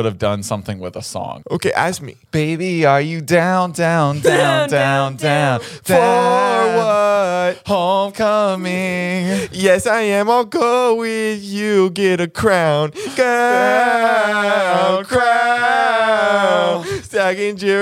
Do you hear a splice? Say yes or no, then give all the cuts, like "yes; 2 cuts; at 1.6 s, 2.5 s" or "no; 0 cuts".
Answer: yes; 1 cut; at 1.4 s